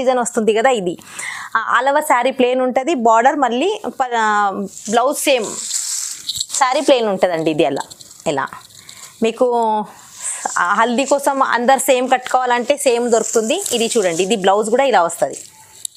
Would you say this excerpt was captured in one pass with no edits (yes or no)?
yes